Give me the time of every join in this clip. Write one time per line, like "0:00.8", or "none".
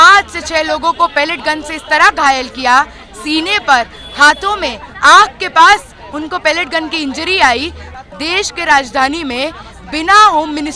0:07.8